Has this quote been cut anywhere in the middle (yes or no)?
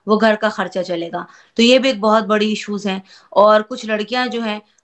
no